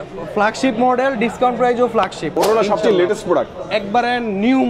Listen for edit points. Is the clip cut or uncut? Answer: cut